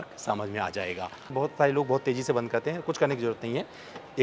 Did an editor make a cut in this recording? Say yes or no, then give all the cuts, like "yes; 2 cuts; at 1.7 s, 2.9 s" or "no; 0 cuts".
yes; 1 cut; at 1.3 s